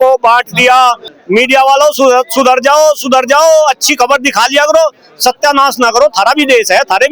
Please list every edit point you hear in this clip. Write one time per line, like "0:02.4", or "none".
0:01.1